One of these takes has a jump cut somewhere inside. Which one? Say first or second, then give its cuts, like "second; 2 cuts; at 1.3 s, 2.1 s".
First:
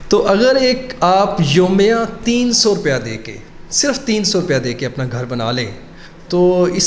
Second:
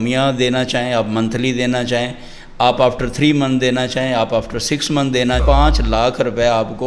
second; 1 cut; at 5.4 s